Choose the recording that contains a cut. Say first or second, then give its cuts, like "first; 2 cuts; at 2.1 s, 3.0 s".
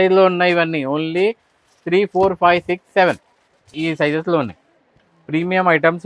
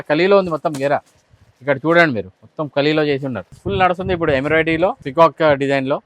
second; 2 cuts; at 3.5 s, 5.0 s